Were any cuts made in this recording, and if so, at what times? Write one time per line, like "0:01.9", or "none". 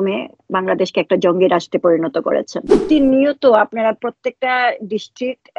0:02.8